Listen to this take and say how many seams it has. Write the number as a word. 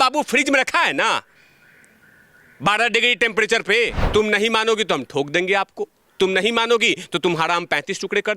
one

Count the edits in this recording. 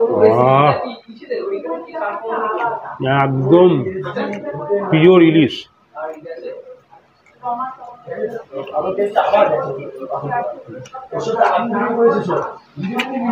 one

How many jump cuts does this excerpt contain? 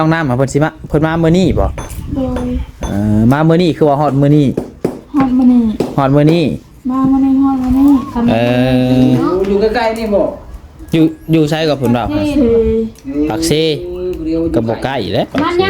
zero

